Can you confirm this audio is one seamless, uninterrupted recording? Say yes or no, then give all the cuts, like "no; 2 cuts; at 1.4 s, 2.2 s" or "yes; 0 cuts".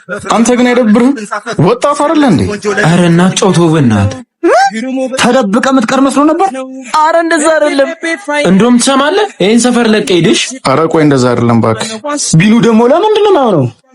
yes; 0 cuts